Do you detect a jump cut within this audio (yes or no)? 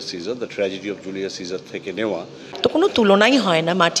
yes